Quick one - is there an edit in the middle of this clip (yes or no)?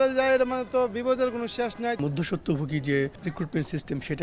yes